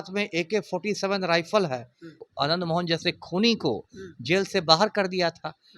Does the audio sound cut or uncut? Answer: cut